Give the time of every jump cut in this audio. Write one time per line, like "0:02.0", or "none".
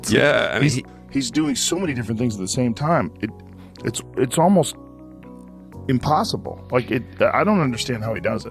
0:00.9